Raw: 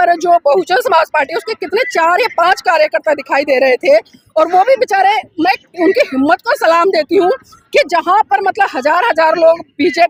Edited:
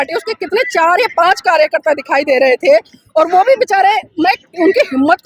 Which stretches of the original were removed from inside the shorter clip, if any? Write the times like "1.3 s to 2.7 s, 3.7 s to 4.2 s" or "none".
none